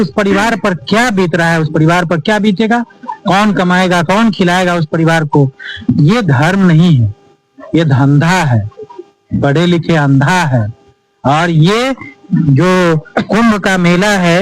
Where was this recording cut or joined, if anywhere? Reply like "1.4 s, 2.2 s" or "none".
none